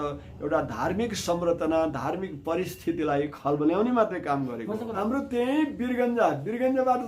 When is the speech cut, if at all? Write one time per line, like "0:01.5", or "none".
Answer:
0:05.0